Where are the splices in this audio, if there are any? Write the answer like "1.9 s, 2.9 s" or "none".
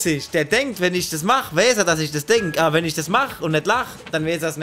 none